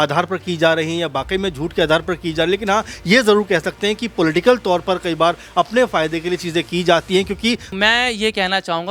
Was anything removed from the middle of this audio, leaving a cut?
yes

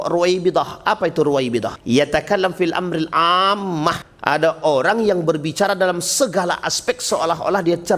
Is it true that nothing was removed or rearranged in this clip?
no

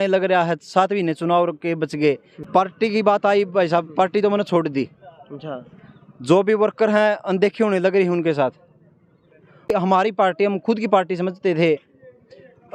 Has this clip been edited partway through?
yes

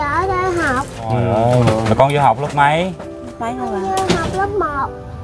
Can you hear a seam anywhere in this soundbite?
yes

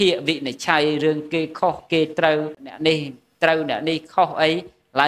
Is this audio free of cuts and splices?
no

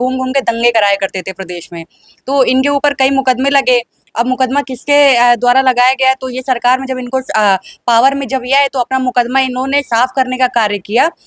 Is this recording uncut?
yes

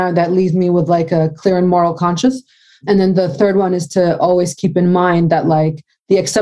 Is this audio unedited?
yes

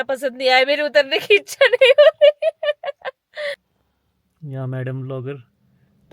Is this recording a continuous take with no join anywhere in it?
no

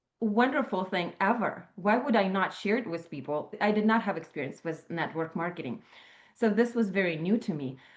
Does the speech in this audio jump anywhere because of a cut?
yes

